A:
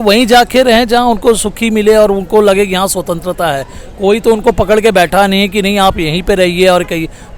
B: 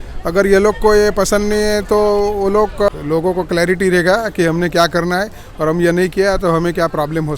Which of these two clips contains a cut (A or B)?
B